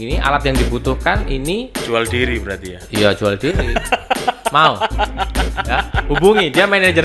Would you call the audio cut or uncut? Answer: uncut